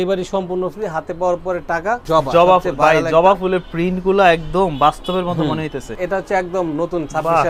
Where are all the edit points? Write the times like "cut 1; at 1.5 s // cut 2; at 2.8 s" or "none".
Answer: cut 1; at 2.0 s // cut 2; at 5.9 s